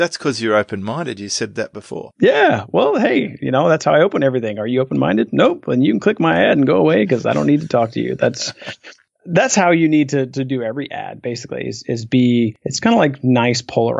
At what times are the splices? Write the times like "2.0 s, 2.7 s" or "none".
12.6 s